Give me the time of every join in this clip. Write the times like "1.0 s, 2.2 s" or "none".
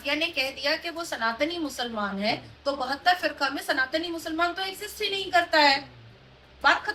none